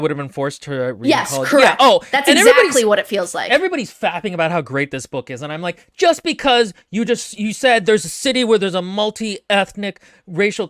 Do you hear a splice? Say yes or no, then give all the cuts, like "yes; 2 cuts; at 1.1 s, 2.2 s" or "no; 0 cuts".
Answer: yes; 1 cut; at 3.5 s